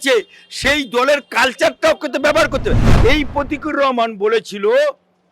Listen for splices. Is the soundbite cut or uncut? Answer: cut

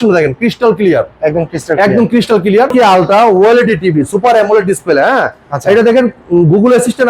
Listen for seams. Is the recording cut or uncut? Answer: cut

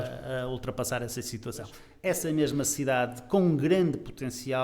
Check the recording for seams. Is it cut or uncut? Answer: cut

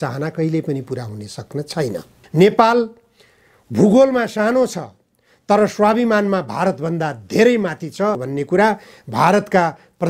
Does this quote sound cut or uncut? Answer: cut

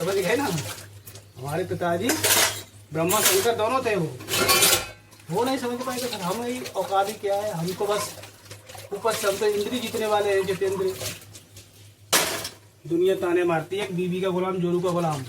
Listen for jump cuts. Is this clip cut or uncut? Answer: cut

